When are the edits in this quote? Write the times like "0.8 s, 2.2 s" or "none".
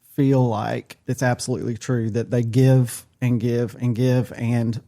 0.9 s